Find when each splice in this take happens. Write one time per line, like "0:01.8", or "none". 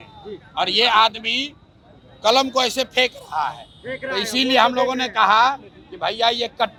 none